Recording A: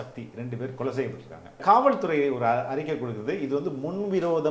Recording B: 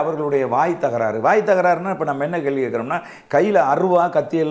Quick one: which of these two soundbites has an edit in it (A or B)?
A